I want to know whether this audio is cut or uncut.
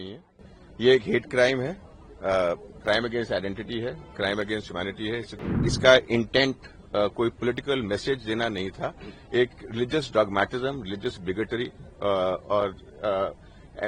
cut